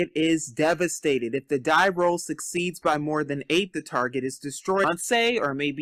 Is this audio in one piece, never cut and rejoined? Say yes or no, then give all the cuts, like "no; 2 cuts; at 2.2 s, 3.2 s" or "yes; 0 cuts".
yes; 0 cuts